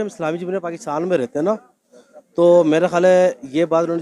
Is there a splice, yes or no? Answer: no